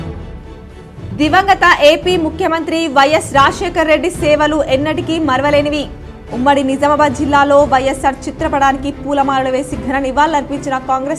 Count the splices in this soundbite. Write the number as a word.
one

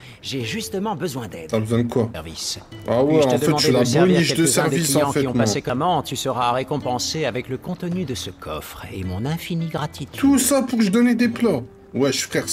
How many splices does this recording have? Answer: two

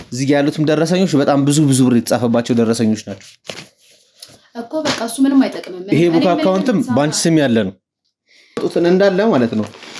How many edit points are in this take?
one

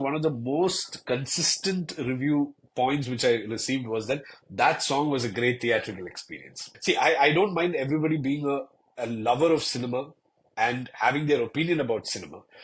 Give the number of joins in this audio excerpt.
one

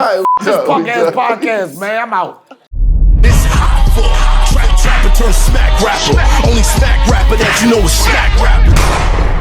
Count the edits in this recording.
one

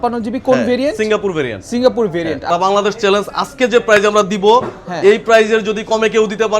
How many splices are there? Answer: one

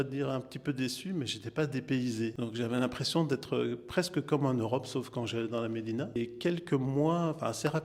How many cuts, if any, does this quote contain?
two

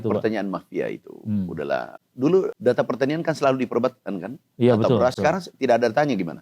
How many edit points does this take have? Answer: two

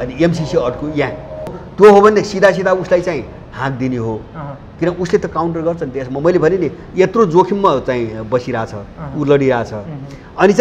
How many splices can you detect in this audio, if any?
one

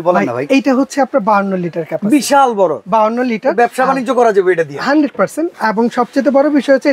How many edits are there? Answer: zero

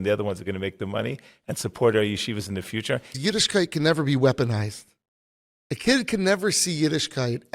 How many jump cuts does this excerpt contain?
one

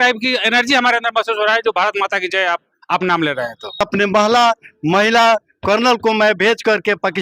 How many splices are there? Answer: one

